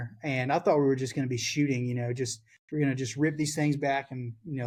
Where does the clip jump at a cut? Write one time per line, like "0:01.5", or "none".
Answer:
none